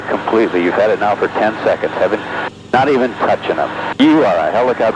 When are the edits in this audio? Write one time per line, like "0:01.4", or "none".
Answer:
none

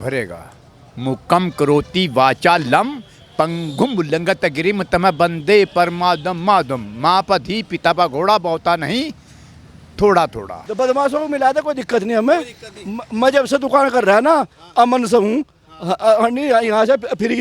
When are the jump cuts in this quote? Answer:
0:10.6

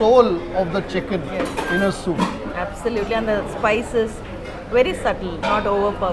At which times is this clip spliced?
none

